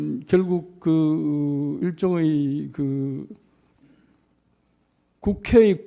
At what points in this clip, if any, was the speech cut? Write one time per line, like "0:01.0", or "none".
0:03.1